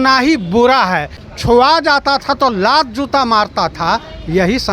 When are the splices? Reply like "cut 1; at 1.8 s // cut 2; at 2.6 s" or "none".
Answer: cut 1; at 1.2 s